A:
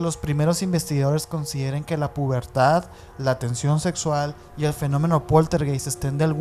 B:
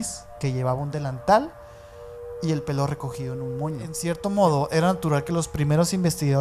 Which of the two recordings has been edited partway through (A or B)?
B